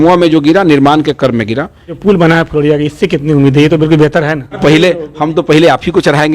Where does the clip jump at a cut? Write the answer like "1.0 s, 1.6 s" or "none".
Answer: 2.0 s, 4.6 s